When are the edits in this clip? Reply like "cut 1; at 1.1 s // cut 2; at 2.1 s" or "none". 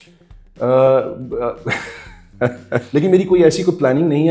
cut 1; at 2.9 s